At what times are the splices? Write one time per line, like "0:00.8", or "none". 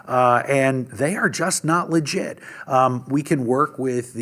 none